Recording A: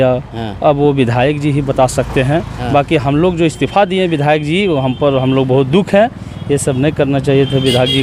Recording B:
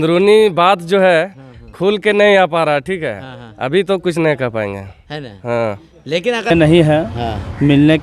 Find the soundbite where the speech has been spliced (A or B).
B